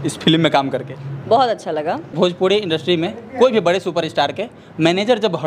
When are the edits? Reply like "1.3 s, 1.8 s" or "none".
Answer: 2.1 s